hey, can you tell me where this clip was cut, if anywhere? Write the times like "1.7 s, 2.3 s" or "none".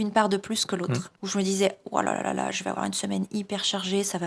1.1 s